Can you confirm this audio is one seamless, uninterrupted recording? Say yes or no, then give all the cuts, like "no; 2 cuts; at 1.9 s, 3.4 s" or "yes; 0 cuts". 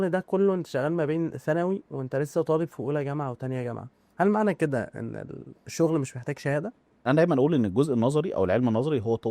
no; 1 cut; at 6.9 s